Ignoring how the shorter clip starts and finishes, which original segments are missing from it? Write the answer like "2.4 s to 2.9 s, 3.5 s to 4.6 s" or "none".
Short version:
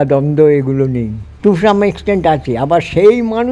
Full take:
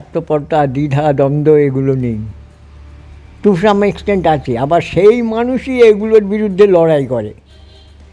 2.3 s to 3.2 s